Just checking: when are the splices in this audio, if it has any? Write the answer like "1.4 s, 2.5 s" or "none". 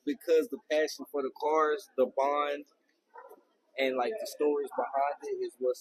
none